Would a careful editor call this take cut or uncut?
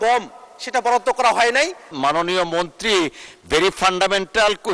cut